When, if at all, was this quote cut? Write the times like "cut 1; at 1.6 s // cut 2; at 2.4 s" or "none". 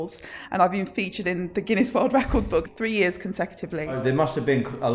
cut 1; at 2.7 s // cut 2; at 4.0 s